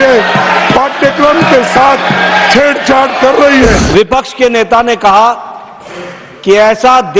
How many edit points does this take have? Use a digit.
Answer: 1